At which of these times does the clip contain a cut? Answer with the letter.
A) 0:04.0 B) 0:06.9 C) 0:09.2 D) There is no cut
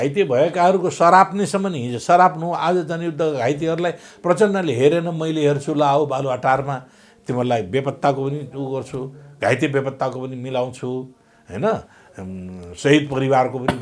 D